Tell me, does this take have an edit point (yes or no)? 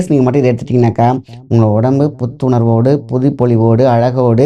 no